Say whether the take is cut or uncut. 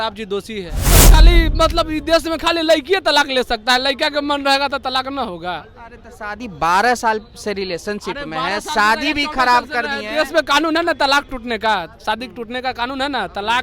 cut